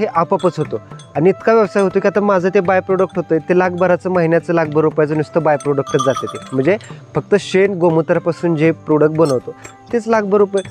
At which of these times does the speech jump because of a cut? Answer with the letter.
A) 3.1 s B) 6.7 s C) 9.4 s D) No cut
D